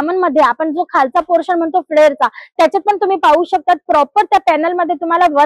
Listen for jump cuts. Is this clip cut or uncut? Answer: uncut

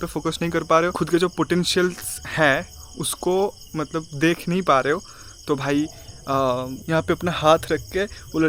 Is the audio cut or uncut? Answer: cut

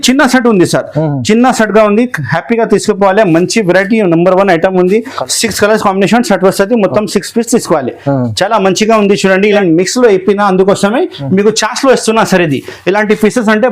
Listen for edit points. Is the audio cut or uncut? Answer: cut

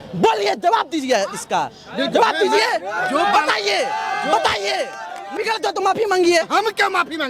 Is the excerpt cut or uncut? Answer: cut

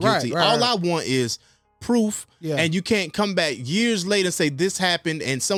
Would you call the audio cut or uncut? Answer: uncut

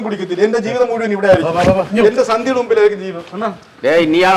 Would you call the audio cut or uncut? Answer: uncut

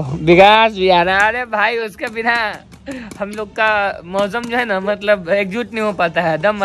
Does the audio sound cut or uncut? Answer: uncut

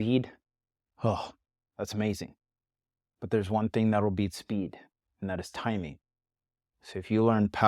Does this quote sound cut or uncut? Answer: uncut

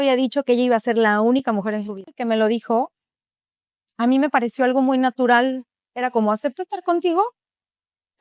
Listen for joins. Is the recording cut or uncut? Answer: cut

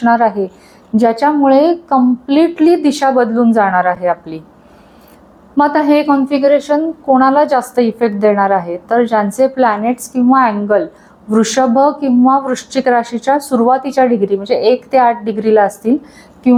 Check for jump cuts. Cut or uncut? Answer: uncut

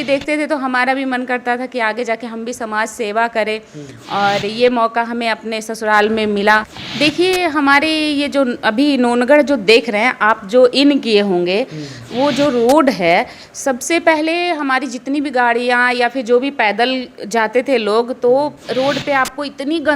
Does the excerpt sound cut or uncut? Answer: cut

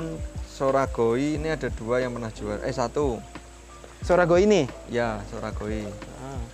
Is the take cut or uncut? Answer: uncut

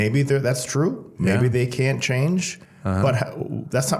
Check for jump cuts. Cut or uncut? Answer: uncut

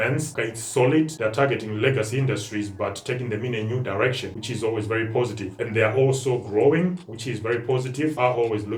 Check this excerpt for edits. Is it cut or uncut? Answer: uncut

